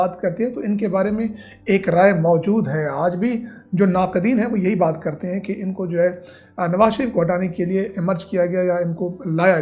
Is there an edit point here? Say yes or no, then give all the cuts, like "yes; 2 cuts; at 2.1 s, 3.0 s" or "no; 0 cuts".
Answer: no; 0 cuts